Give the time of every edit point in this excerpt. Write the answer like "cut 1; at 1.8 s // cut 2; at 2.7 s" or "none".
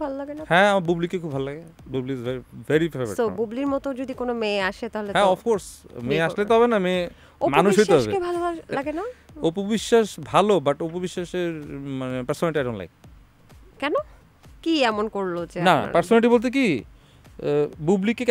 none